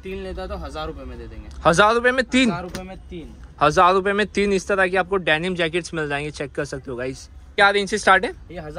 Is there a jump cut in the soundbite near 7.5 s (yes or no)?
yes